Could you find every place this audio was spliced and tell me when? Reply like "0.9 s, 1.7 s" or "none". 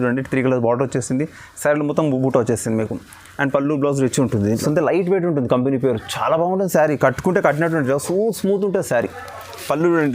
4.6 s